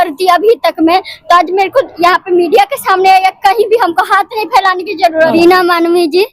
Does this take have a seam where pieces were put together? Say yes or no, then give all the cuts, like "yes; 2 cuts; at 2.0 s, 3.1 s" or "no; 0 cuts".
yes; 1 cut; at 5.3 s